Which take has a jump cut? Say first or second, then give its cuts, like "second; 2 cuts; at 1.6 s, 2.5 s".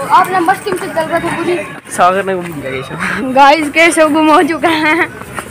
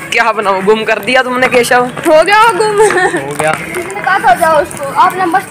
first; 1 cut; at 1.8 s